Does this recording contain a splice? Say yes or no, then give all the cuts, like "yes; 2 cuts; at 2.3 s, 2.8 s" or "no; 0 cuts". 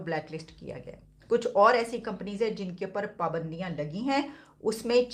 no; 0 cuts